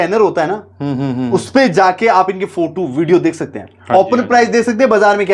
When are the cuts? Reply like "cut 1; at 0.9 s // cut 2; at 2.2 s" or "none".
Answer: none